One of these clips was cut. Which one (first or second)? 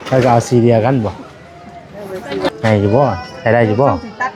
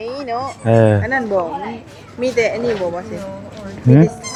first